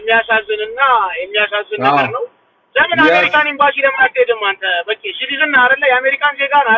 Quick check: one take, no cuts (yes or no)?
yes